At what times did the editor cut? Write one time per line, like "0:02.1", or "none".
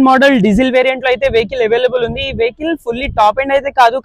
none